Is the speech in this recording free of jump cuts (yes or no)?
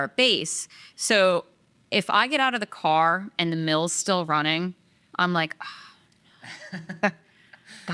yes